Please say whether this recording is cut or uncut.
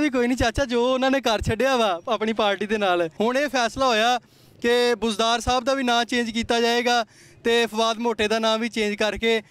cut